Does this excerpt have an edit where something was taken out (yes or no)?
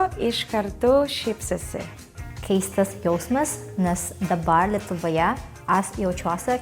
yes